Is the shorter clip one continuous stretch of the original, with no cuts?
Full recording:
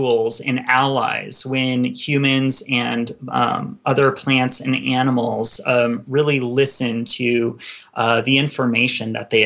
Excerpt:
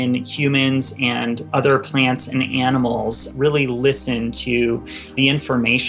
no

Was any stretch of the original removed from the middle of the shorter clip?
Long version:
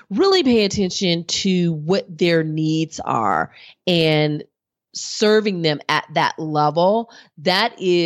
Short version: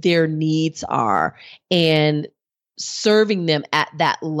no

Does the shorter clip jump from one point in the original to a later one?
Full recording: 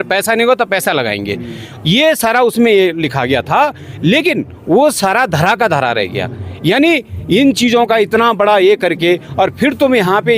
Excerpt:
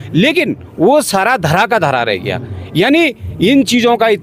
no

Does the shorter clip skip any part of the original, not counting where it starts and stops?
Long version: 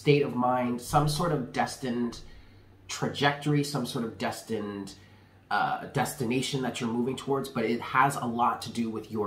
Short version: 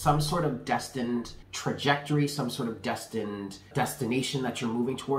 yes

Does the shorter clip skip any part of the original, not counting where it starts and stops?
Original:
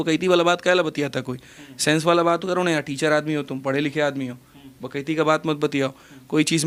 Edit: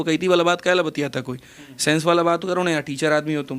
no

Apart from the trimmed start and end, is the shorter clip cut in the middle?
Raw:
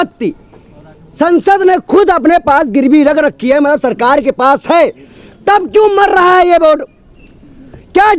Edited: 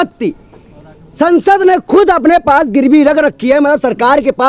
no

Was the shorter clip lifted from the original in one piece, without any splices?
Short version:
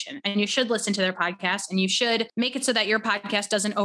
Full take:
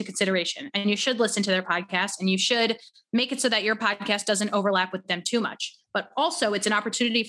no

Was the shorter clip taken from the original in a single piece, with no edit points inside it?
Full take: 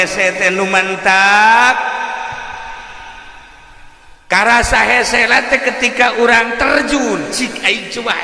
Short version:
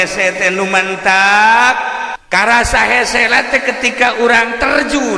no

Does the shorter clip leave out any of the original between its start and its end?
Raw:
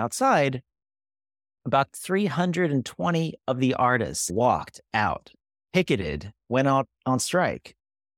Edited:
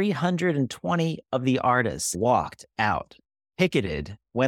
no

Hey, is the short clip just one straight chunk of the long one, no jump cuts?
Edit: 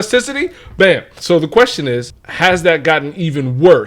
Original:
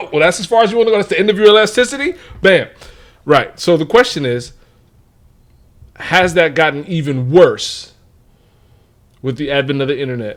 no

